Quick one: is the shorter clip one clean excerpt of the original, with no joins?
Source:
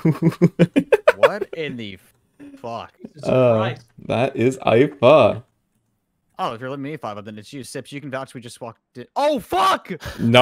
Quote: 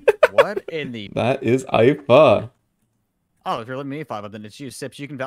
no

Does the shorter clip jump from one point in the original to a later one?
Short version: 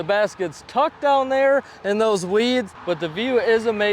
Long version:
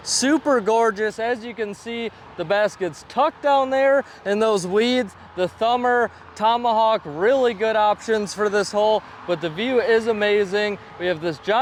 yes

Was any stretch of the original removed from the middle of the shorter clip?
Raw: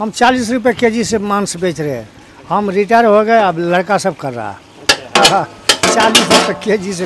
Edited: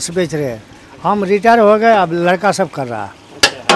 no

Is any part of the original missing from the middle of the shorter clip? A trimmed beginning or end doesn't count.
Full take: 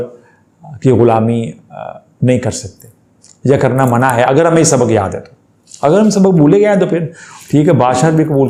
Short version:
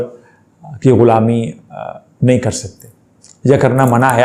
no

